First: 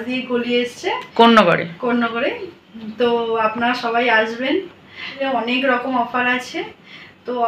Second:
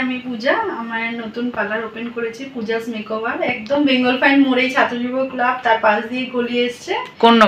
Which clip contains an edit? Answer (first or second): first